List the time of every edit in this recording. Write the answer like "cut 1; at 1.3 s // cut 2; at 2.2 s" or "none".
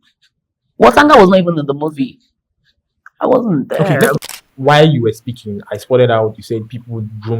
cut 1; at 4.2 s

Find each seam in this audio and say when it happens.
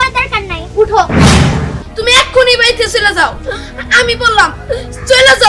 cut 1; at 1.8 s

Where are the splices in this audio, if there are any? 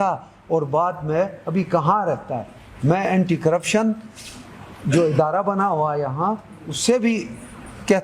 none

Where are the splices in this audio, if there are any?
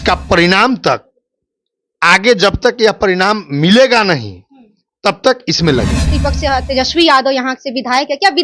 cut 1; at 6.1 s

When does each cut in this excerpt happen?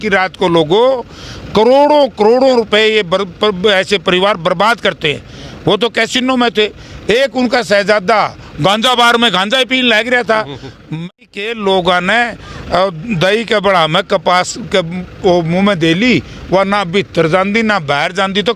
cut 1; at 10.9 s

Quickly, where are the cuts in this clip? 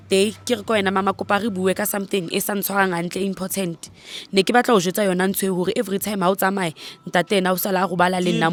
none

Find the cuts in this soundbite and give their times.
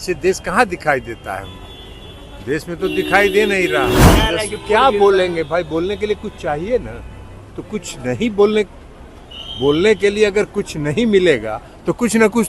cut 1; at 4.1 s

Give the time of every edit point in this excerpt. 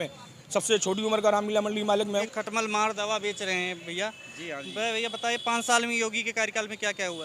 cut 1; at 2.3 s

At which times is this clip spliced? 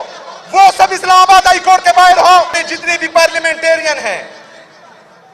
cut 1; at 2.7 s

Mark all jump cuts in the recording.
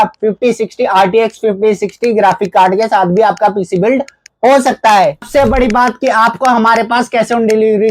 cut 1; at 5.2 s

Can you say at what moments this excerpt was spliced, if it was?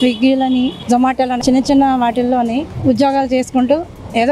cut 1; at 1.4 s

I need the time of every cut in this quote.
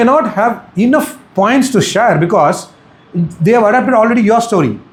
none

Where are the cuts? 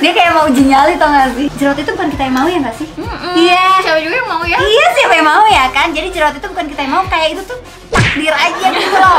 cut 1; at 1.5 s

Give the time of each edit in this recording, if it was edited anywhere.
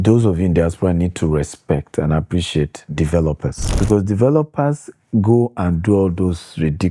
cut 1; at 3.6 s

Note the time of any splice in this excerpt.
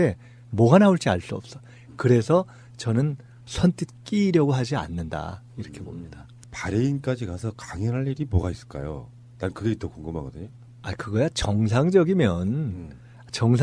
cut 1; at 9.6 s

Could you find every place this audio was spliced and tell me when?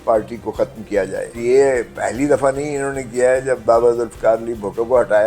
cut 1; at 1.4 s // cut 2; at 3.6 s

